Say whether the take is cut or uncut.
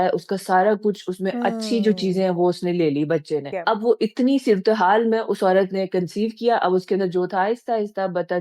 cut